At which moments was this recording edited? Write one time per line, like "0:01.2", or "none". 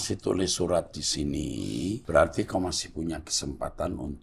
0:02.0